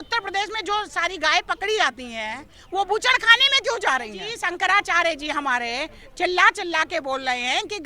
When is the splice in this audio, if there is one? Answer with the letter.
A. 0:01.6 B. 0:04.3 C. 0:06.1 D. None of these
B